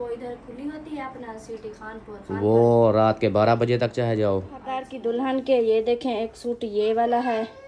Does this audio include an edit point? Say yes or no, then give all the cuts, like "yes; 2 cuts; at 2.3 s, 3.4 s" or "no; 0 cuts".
yes; 1 cut; at 4.9 s